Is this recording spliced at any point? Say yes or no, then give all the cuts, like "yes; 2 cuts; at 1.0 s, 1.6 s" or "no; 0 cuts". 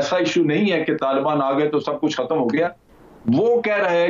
yes; 1 cut; at 2.9 s